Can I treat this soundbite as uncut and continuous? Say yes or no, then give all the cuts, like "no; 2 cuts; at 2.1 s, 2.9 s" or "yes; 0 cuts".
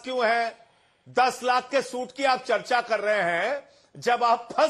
no; 1 cut; at 0.9 s